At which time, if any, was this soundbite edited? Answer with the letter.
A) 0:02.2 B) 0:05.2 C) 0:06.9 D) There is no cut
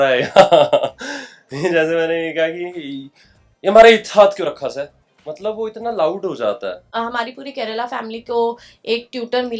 C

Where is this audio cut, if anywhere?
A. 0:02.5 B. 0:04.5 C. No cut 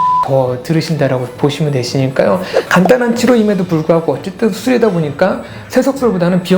A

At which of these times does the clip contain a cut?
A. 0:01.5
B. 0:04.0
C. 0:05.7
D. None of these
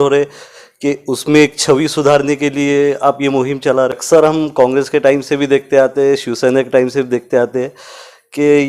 B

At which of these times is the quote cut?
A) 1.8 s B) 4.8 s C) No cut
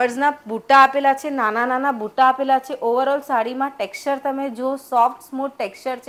C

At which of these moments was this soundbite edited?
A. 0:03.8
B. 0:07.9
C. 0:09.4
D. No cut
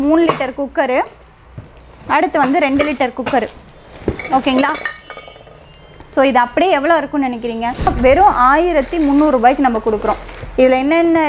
B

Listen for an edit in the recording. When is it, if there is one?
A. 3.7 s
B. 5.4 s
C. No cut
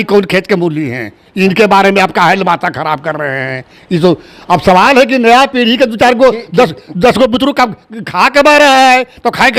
C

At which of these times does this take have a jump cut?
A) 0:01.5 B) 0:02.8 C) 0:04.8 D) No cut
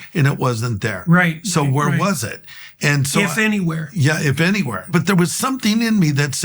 C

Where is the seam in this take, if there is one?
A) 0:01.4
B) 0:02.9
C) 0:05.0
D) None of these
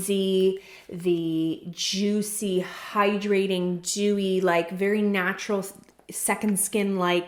D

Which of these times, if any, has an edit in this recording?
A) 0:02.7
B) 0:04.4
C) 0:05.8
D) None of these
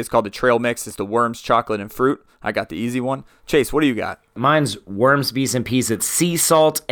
B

